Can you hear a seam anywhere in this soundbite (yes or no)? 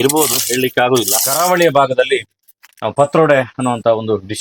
yes